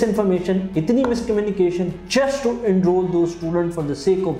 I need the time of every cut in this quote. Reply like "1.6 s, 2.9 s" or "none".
none